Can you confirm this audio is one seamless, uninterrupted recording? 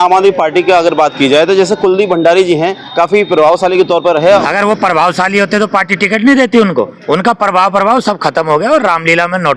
no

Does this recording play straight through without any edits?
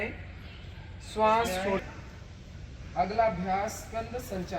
no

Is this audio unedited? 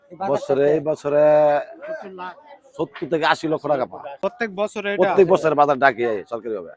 no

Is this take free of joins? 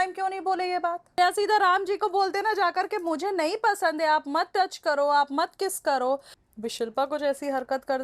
no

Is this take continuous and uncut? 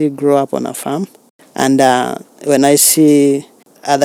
yes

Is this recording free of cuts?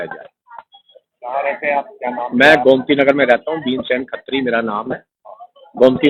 yes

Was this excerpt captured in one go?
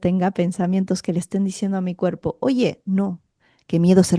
yes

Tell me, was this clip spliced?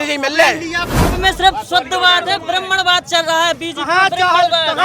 yes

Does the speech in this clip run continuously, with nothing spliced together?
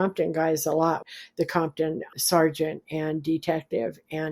no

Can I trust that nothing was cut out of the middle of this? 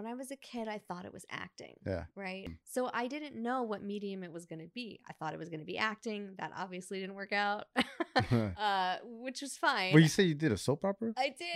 no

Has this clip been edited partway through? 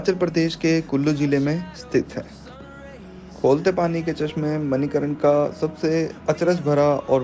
no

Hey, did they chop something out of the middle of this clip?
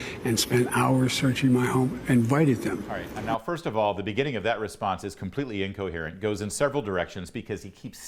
no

